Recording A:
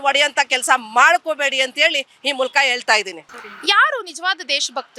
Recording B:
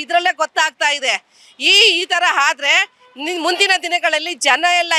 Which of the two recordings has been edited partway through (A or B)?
A